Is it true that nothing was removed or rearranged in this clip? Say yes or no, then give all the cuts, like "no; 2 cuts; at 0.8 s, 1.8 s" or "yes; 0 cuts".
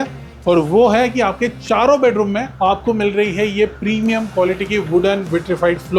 yes; 0 cuts